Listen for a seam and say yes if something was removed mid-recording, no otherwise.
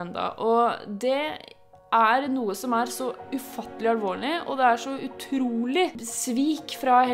yes